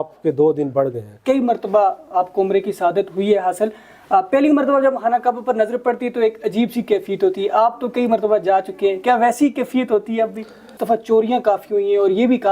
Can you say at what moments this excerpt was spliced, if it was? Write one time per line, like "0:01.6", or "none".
0:01.2
0:10.7